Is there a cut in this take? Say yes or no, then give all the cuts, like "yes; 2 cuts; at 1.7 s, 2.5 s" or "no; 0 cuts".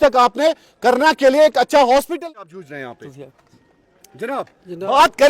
yes; 1 cut; at 2.2 s